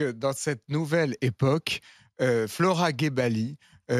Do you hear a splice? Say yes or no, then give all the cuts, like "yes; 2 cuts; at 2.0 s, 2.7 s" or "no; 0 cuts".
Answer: no; 0 cuts